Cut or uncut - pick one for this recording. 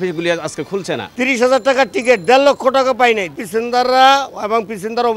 cut